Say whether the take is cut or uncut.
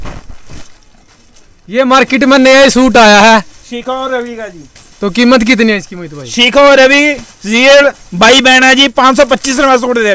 uncut